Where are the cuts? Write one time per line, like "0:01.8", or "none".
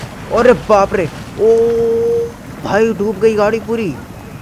none